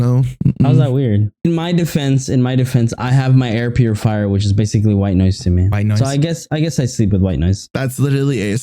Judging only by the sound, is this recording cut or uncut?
cut